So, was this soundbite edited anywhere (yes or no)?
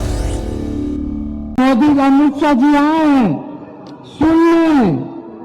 yes